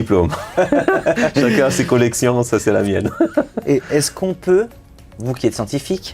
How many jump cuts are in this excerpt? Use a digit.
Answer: 0